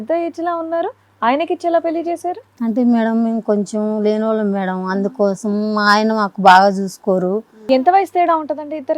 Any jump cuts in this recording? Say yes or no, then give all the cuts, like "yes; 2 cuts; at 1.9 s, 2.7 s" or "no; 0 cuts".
yes; 1 cut; at 7.6 s